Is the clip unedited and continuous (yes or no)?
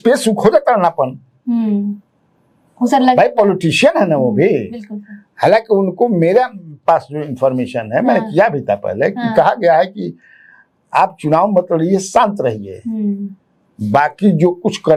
yes